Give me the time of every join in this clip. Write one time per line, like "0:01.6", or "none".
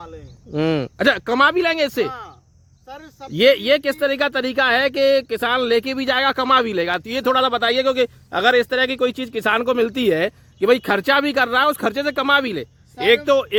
none

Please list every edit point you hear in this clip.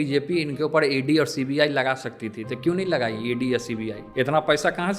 0:04.0

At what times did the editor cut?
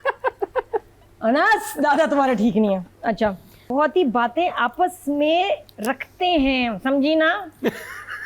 0:03.5

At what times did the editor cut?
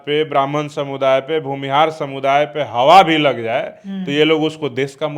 none

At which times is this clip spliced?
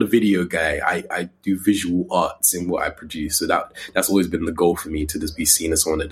none

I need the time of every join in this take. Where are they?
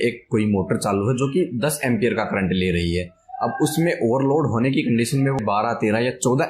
0:05.4

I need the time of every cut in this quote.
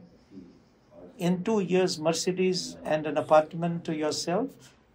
none

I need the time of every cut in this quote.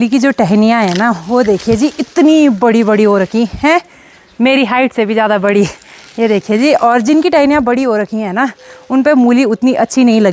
none

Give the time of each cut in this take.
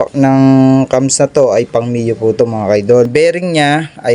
0:03.1

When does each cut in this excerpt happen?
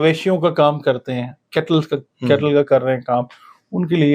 none

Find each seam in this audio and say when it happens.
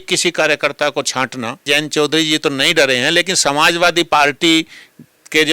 0:01.6

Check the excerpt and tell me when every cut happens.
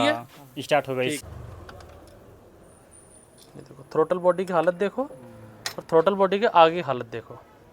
0:01.2

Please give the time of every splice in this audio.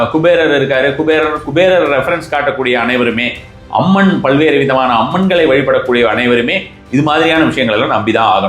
none

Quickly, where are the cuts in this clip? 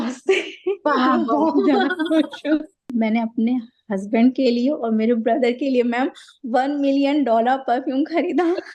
0:02.9

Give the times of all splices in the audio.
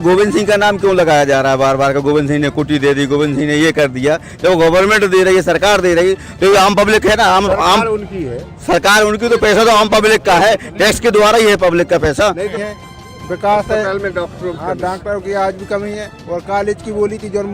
0:12.6

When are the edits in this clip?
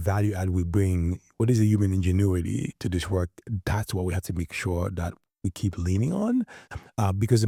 none

